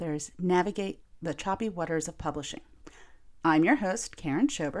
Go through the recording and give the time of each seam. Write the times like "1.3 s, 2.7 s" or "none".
1.1 s